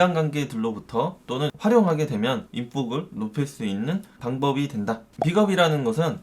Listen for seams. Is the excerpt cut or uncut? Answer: cut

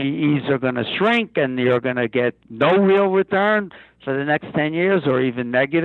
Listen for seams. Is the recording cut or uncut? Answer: uncut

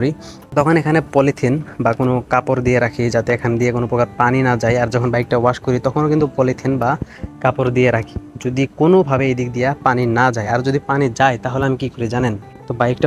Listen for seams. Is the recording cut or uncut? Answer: uncut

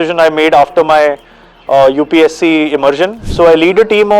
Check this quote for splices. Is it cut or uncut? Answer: cut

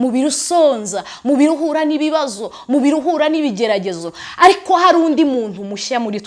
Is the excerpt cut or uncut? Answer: uncut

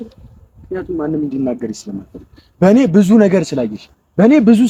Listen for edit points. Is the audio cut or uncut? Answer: uncut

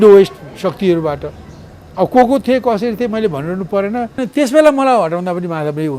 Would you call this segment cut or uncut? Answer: cut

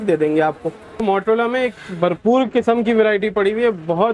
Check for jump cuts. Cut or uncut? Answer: cut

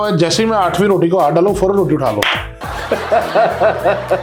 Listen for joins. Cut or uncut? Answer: uncut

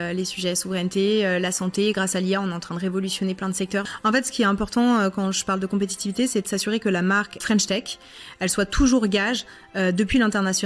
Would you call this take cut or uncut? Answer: cut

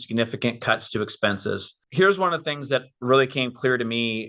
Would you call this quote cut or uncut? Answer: cut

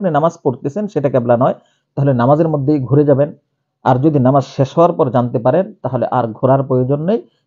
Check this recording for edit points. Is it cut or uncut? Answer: uncut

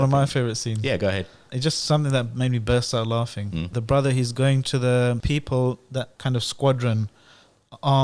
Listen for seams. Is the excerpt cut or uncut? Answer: cut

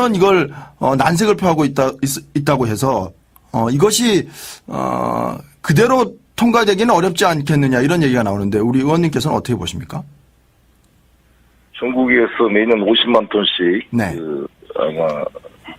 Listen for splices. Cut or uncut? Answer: cut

